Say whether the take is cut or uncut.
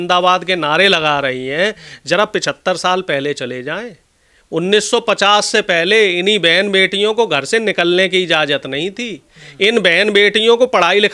uncut